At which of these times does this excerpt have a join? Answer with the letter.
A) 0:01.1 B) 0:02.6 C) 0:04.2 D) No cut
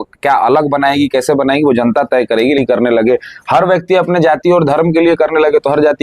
B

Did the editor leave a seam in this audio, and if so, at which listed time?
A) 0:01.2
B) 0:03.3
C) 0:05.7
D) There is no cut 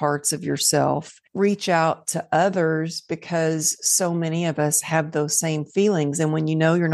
A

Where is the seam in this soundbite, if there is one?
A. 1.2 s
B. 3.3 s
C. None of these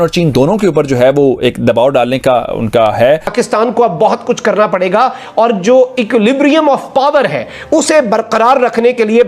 B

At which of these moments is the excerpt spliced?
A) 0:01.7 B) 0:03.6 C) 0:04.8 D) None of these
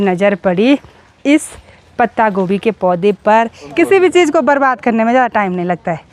B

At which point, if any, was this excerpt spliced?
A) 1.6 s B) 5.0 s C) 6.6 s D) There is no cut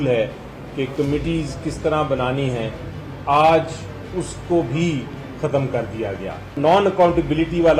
C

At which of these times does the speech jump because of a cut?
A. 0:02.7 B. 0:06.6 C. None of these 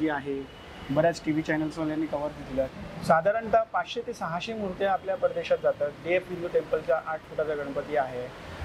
A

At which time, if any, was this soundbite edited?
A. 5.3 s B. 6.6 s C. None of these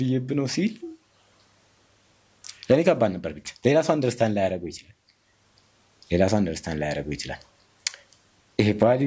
C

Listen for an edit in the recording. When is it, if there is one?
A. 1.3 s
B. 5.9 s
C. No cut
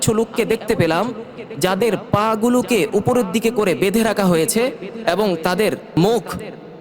B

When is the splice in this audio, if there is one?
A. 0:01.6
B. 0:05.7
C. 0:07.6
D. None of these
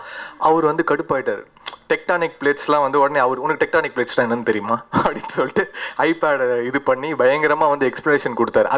D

